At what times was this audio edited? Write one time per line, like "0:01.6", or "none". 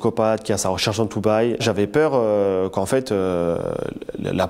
0:01.6